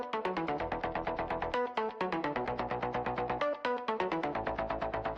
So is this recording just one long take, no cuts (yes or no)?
yes